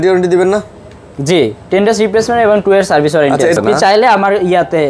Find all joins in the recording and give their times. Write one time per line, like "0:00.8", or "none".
0:03.6